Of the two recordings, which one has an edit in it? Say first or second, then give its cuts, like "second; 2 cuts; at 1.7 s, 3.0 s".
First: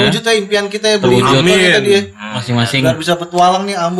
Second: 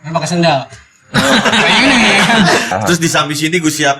second; 1 cut; at 2.7 s